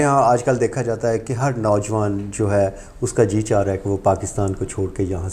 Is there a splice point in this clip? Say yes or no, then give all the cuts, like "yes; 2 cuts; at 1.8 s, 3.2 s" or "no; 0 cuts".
no; 0 cuts